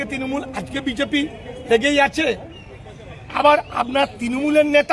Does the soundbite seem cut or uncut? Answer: uncut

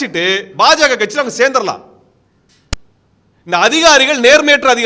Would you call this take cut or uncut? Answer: uncut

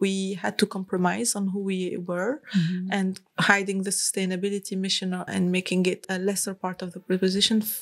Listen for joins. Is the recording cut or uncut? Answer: cut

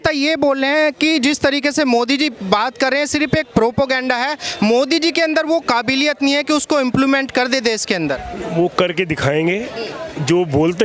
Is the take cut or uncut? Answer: uncut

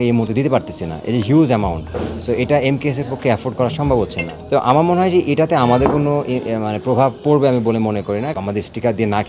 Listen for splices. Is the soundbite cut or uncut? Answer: cut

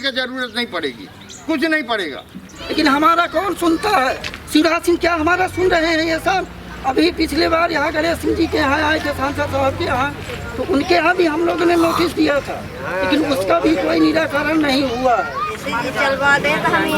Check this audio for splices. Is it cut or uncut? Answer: cut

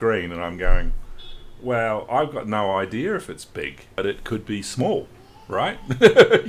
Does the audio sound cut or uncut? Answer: cut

